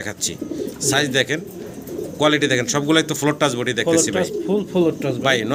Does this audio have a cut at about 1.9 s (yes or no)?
no